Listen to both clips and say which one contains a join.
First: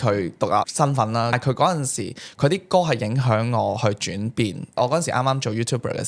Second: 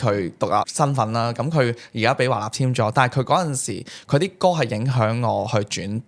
first; 1 cut; at 1.4 s

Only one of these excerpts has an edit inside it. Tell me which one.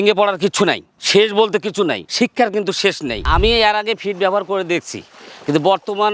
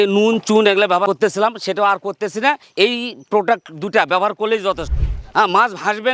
first; 1 cut; at 3.2 s

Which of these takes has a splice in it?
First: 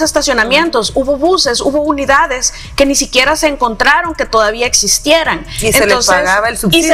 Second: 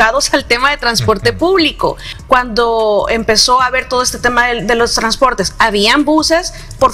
second; 1 cut; at 2.1 s

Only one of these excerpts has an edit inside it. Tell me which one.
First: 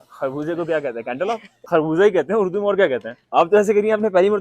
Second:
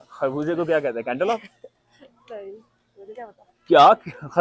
first; 2 cuts; at 1.5 s, 3.1 s

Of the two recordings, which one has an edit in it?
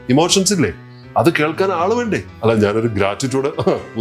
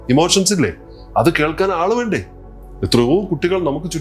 first; 1 cut; at 2.3 s

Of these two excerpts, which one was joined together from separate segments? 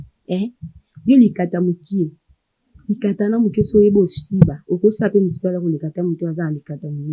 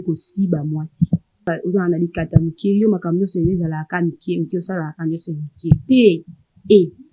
second; 1 cut; at 1.5 s

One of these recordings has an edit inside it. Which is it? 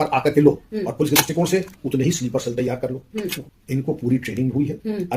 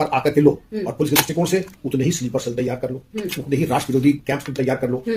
first; 1 cut; at 3.4 s

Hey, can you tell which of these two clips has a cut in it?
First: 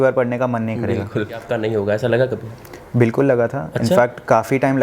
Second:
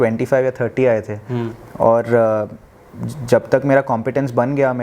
first; 1 cut; at 1.5 s

